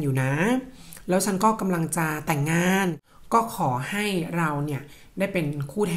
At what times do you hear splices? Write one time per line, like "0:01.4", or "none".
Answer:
0:03.0

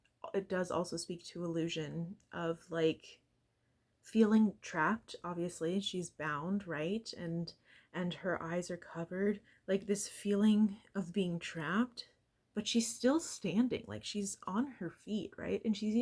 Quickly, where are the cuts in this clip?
none

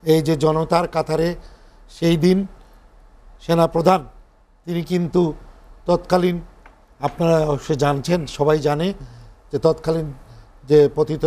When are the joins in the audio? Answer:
none

